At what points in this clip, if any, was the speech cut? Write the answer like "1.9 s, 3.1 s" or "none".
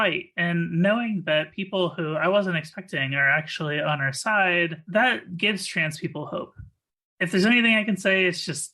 none